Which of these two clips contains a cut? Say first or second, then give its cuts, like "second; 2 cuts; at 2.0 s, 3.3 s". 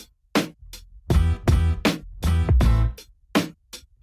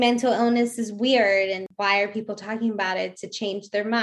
second; 1 cut; at 1.7 s